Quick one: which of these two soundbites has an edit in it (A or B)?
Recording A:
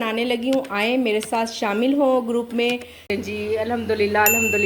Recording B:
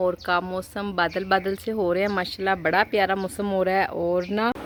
A